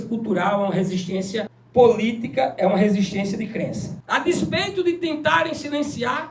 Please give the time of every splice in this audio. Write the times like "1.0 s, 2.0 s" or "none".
1.6 s, 3.9 s